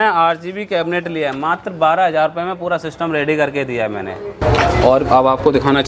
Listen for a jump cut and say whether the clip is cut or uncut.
cut